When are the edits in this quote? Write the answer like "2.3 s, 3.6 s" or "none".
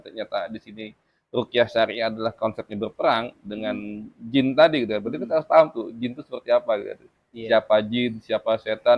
none